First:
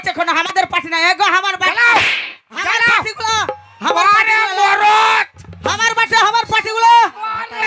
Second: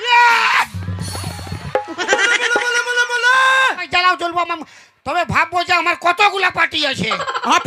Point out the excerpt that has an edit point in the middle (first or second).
second